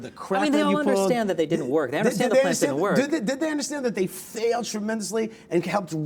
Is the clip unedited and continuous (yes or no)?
yes